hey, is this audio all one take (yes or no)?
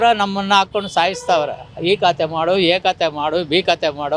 yes